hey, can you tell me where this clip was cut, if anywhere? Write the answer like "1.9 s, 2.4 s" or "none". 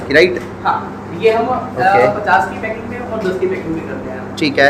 none